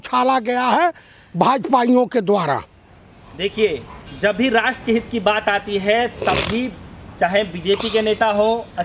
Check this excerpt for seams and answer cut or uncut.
uncut